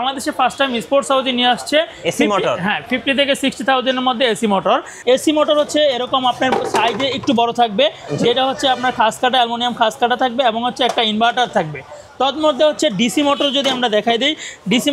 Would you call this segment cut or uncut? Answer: cut